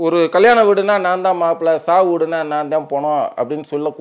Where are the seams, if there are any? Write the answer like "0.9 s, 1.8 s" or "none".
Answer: none